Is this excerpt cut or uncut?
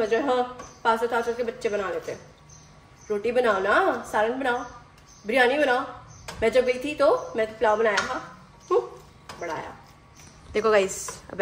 uncut